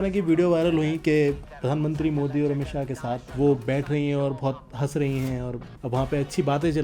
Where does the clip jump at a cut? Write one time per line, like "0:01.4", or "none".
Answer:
0:01.4
0:03.3
0:05.6